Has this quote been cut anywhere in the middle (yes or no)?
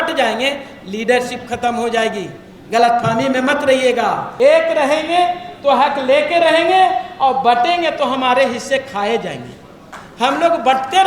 yes